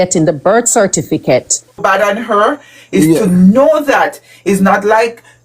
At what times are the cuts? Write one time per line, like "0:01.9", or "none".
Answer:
0:01.8